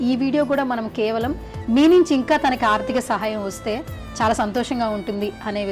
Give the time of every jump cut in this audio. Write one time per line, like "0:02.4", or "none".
none